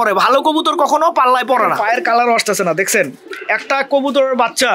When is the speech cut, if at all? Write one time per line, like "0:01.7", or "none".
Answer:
0:01.8